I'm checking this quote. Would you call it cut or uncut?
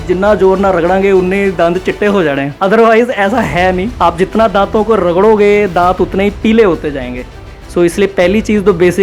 cut